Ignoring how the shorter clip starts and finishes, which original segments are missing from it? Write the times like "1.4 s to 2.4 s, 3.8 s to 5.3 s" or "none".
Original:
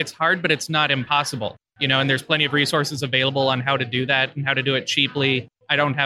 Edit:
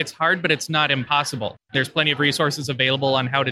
1.7 s to 2.1 s